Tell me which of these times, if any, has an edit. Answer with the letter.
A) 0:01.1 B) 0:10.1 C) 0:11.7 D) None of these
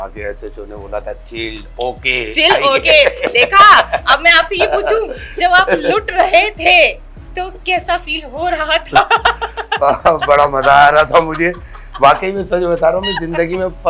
D